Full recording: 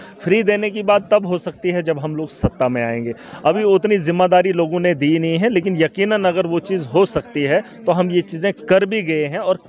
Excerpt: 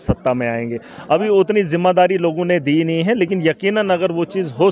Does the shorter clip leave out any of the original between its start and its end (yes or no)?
no